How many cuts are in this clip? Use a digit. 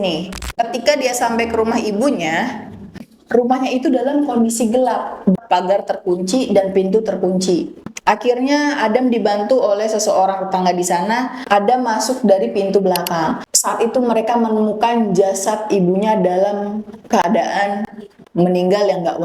1